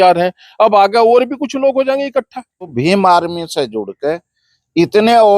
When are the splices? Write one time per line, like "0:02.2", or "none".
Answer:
0:02.7